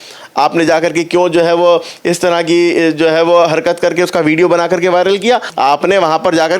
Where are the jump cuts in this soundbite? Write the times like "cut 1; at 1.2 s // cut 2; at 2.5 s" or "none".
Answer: cut 1; at 5.5 s